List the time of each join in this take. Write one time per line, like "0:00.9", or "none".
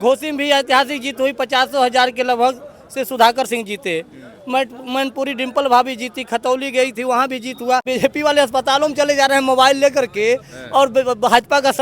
0:07.8

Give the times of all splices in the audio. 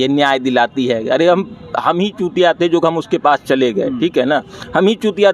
none

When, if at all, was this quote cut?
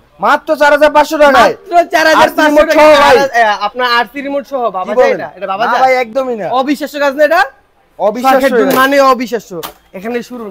none

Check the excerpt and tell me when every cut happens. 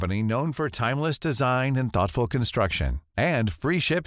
none

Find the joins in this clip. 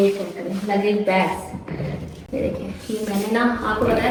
none

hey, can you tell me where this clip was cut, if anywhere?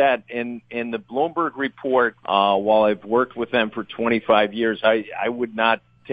0:02.2

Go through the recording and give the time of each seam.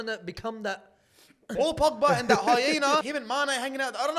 0:01.5
0:03.0

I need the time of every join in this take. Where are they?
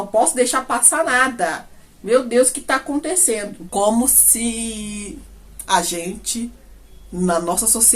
0:03.6

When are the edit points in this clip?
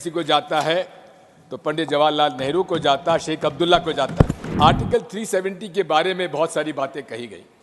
0:04.5

